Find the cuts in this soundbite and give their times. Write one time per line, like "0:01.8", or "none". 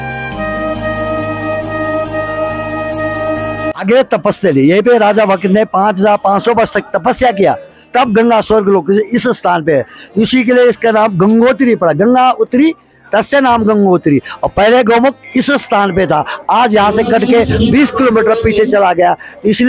0:03.8